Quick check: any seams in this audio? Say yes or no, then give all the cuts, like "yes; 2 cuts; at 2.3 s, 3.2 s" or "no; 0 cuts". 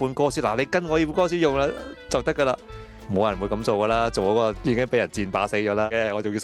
no; 0 cuts